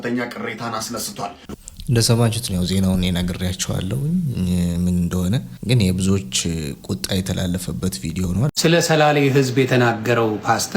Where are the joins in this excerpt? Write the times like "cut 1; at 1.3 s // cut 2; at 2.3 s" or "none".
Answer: cut 1; at 1.5 s // cut 2; at 5.5 s // cut 3; at 8.5 s